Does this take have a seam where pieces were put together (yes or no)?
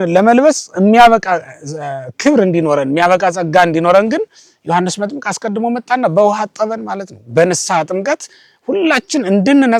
no